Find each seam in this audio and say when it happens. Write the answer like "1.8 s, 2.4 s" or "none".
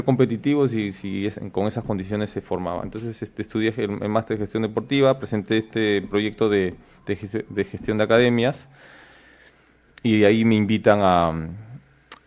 none